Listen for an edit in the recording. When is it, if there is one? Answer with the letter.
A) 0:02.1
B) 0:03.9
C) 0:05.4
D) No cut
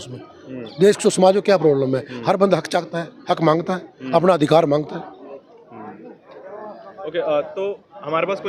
D